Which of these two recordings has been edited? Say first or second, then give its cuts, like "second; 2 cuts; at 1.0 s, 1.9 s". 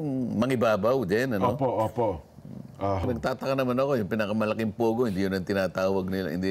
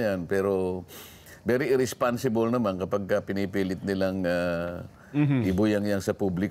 first; 1 cut; at 3.0 s